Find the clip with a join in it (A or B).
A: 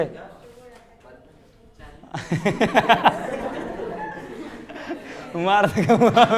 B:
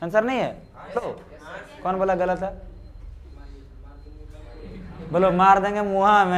B